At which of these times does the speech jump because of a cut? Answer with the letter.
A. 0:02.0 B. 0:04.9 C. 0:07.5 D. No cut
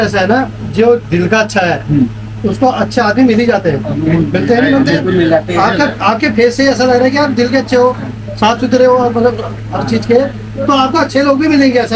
D